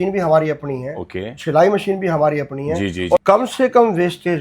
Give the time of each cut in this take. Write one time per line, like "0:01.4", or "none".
0:03.2